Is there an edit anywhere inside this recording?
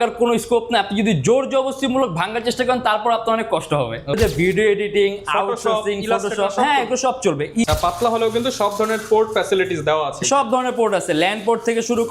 yes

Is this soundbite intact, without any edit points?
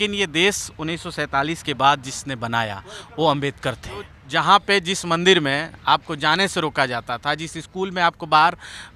no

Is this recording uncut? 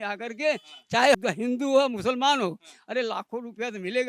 no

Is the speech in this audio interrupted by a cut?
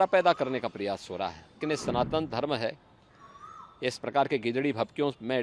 yes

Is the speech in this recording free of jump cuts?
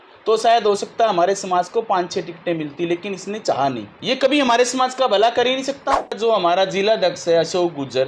no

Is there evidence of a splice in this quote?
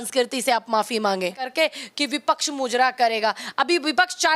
yes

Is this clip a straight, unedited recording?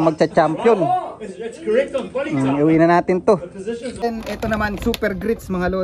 no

